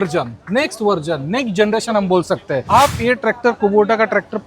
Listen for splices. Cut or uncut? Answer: cut